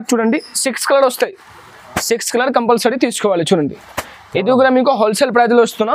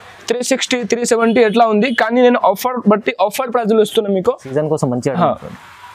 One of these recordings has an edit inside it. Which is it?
second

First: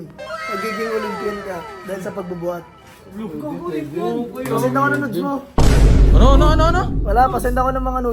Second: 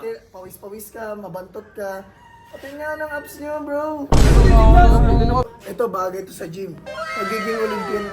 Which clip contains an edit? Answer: second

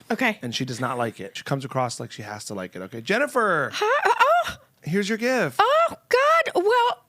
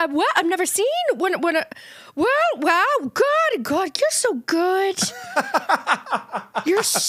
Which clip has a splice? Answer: first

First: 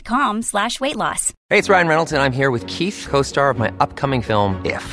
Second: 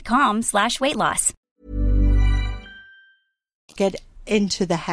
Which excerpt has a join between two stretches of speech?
first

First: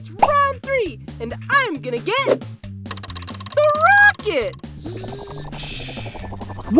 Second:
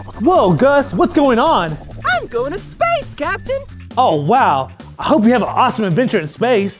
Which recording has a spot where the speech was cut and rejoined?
first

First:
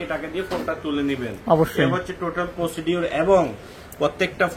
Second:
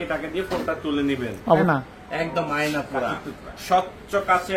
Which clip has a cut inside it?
second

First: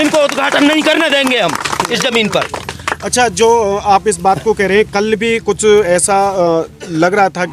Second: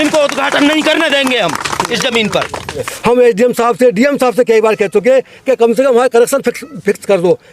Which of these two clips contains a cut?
second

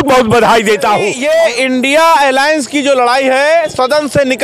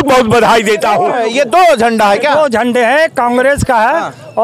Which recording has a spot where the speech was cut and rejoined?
second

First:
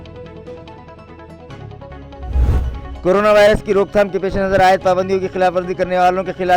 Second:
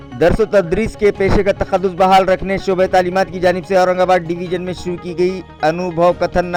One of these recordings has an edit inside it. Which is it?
first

